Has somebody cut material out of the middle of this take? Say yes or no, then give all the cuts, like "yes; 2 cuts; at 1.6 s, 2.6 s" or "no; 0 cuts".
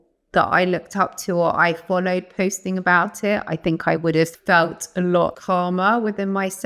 yes; 2 cuts; at 4.4 s, 5.4 s